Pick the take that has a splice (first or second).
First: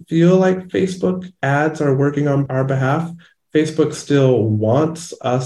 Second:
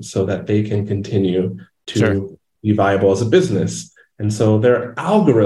first